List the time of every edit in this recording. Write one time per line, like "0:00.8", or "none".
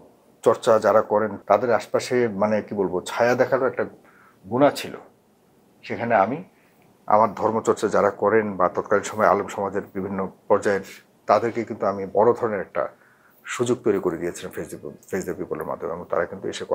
0:01.3
0:11.0